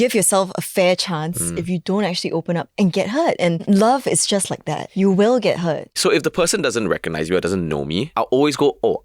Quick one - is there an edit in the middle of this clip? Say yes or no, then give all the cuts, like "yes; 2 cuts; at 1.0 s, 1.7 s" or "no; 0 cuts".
yes; 4 cuts; at 3.6 s, 4.8 s, 6.0 s, 8.1 s